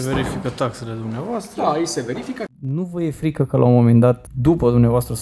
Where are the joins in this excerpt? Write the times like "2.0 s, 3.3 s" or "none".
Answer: 2.5 s, 4.3 s